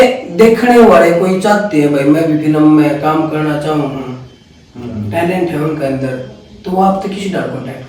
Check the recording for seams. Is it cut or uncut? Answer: uncut